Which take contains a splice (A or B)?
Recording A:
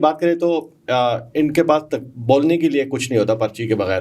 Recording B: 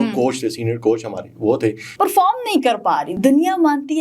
B